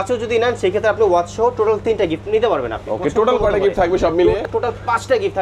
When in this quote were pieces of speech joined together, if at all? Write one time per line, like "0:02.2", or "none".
0:04.4